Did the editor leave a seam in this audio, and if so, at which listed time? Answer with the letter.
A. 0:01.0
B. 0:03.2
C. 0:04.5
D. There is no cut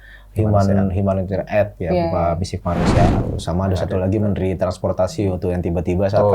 B